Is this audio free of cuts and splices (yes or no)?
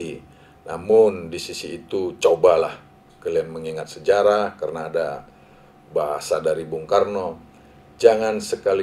yes